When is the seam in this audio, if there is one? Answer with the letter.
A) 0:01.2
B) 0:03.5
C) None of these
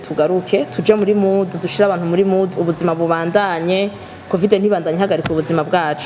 C